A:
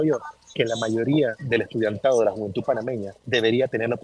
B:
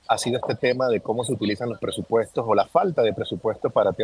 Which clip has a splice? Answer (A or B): A